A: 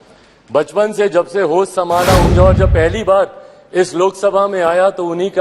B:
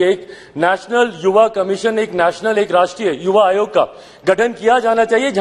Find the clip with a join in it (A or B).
A